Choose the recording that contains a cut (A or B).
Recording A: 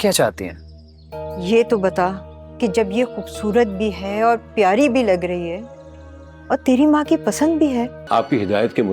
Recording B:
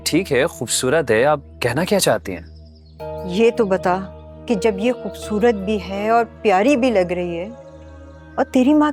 A